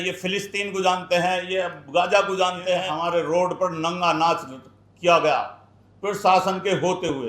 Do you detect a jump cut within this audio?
yes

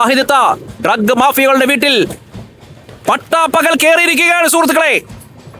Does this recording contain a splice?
no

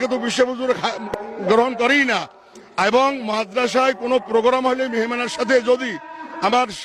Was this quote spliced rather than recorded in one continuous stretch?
yes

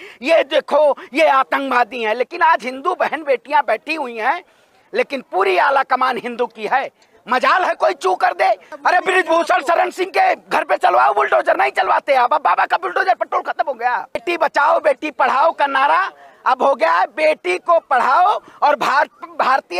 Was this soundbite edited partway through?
yes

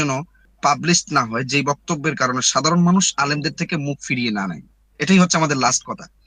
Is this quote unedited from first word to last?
yes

